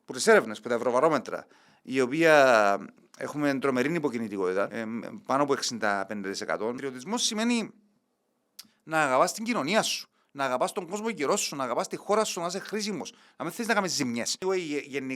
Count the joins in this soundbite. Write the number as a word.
three